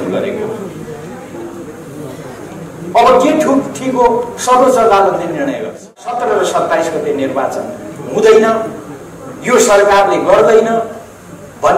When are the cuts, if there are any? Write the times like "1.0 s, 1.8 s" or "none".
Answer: 6.1 s

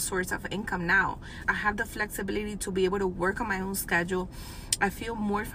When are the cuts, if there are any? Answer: 1.4 s

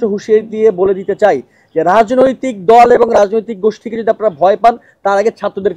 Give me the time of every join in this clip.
none

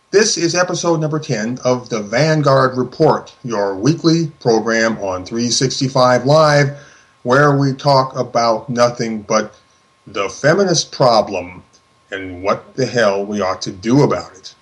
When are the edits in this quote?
10.6 s

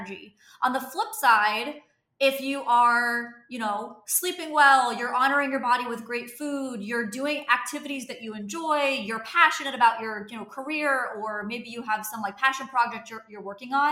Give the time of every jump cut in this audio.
none

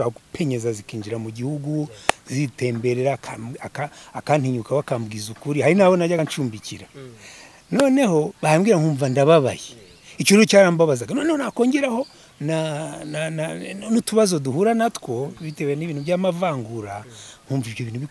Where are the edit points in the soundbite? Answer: none

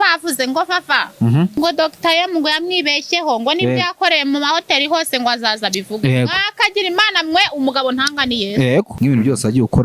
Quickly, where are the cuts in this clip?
1.6 s, 8.9 s

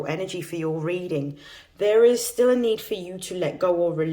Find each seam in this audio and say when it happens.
none

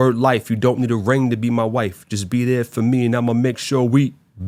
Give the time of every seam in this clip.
none

